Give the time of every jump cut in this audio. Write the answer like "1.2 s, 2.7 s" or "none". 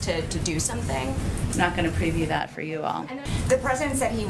3.2 s